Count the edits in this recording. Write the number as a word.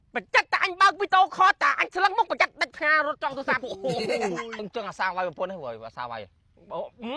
one